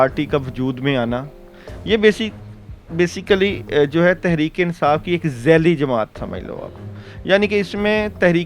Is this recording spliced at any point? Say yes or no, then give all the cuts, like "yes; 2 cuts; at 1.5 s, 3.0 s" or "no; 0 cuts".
no; 0 cuts